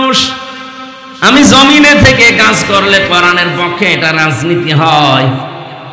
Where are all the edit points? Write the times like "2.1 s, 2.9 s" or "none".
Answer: none